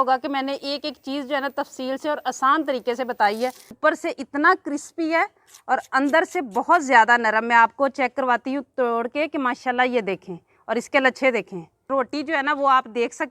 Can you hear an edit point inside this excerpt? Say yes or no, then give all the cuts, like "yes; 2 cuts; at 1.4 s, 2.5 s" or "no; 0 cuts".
yes; 2 cuts; at 3.7 s, 11.9 s